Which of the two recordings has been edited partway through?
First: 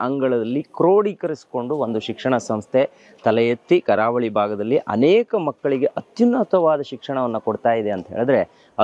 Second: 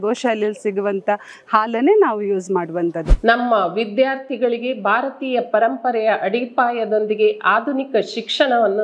second; 1 cut; at 3.1 s

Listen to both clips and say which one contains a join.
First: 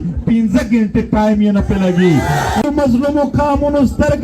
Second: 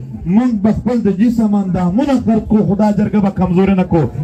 first; 1 cut; at 2.7 s

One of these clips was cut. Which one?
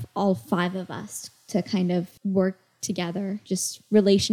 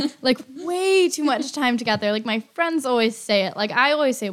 first; 2 cuts; at 2.1 s, 3.4 s

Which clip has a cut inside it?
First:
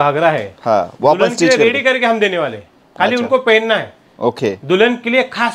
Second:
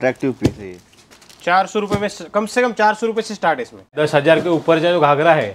second; 1 cut; at 4.0 s

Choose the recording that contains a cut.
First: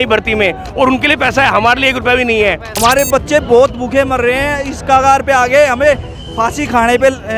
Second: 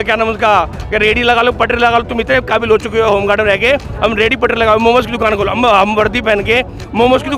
first; 1 cut; at 2.7 s

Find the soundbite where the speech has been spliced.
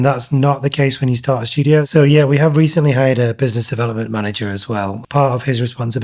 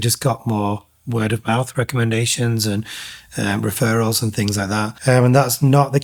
first; 2 cuts; at 1.9 s, 5.0 s

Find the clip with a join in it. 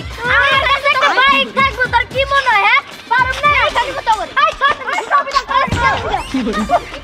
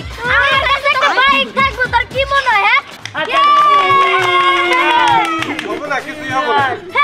second; 1 cut; at 3.0 s

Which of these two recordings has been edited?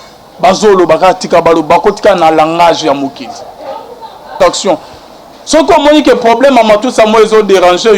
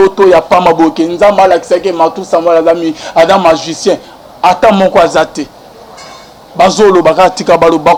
first; 1 cut; at 4.3 s

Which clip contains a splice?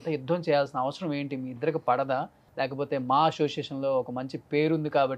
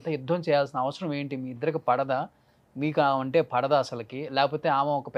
first; 1 cut; at 2.4 s

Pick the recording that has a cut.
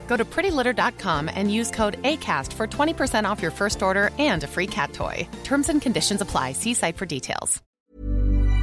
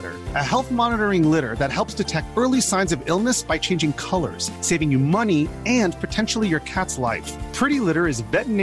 first; 1 cut; at 7.6 s

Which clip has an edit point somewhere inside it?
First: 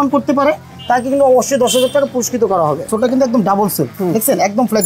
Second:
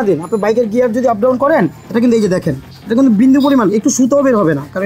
first; 1 cut; at 2.9 s

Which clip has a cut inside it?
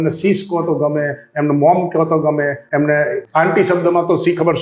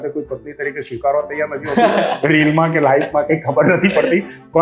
first; 2 cuts; at 2.6 s, 3.2 s

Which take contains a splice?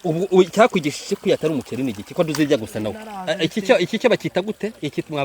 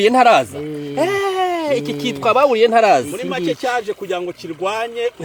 first; 1 cut; at 3.1 s

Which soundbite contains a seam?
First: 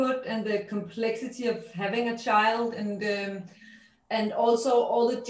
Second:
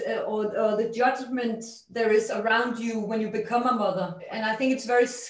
second; 1 cut; at 4.3 s

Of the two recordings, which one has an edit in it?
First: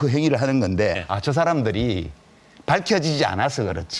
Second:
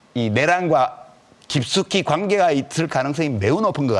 first; 1 cut; at 1.1 s

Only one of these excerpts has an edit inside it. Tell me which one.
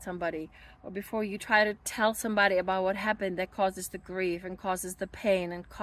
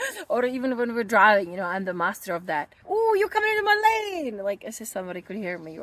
second; 1 cut; at 2.8 s

